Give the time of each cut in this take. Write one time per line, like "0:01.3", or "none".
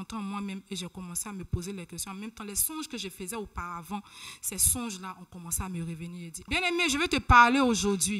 0:06.3

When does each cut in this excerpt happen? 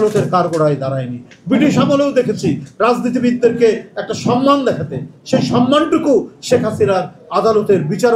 none

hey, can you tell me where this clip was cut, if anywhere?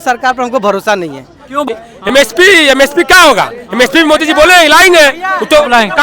0:01.7

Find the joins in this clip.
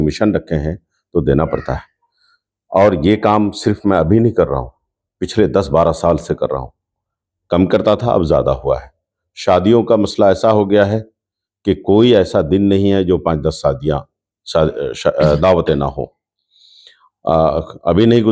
none

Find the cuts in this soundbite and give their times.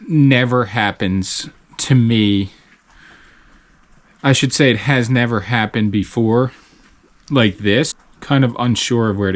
0:08.0

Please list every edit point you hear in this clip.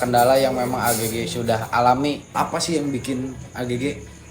0:02.3

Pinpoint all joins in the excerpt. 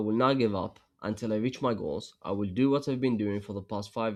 none

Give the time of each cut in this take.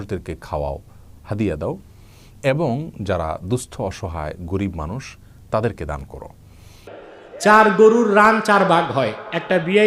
0:06.9

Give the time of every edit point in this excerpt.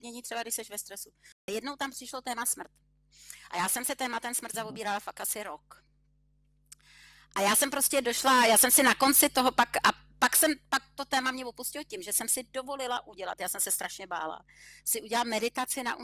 0:01.4

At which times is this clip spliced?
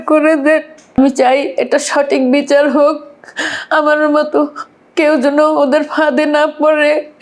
0:01.0

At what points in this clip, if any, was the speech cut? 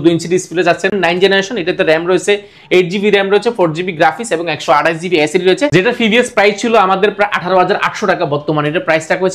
0:00.9
0:05.7

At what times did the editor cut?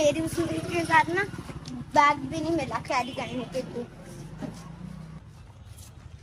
0:05.2

